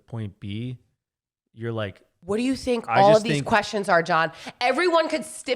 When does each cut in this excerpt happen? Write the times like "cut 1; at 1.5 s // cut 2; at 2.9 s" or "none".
cut 1; at 2.1 s